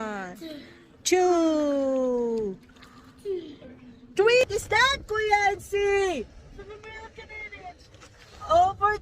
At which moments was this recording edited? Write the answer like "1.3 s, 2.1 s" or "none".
4.4 s